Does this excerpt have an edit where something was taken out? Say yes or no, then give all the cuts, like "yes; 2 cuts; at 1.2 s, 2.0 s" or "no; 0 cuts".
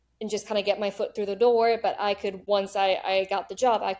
yes; 1 cut; at 2.3 s